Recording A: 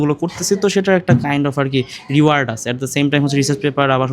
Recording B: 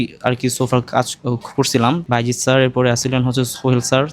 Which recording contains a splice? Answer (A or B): B